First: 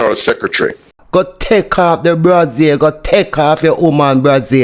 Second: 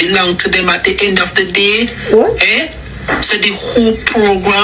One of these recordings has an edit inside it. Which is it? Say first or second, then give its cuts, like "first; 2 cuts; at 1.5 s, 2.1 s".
first; 1 cut; at 0.9 s